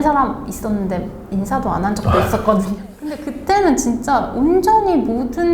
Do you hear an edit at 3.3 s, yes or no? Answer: yes